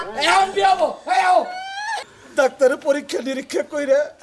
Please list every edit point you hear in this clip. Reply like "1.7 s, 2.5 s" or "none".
2.0 s